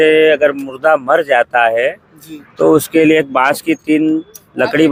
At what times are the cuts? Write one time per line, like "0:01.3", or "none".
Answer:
none